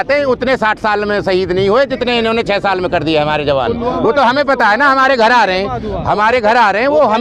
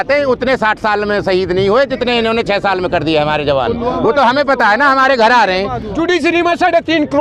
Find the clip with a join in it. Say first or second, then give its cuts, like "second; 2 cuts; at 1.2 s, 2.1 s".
second; 1 cut; at 5.9 s